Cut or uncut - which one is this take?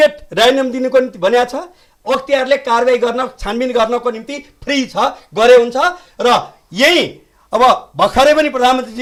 uncut